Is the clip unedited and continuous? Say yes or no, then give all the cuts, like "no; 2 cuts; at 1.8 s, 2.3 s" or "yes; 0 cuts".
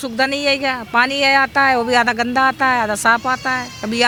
yes; 0 cuts